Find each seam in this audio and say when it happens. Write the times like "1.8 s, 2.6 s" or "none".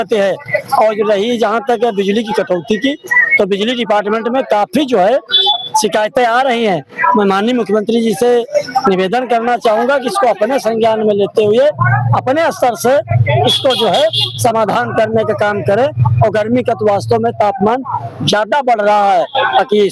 none